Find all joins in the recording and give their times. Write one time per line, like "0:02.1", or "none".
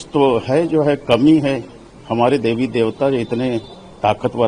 none